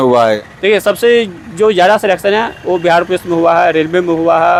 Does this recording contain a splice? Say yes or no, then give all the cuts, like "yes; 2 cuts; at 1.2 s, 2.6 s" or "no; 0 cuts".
no; 0 cuts